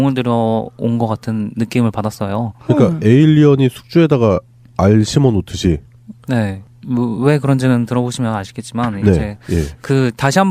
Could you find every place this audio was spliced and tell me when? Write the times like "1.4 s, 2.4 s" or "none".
3.4 s